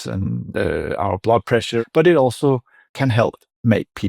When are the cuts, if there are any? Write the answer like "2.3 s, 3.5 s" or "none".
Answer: 1.8 s